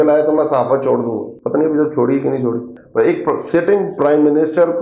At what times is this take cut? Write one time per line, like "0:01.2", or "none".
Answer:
0:01.3
0:02.7